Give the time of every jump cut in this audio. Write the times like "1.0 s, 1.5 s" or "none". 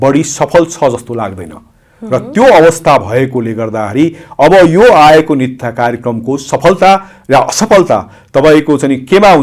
none